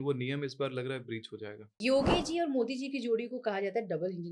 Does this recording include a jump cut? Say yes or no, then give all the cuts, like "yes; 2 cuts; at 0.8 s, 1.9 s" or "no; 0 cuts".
yes; 1 cut; at 1.8 s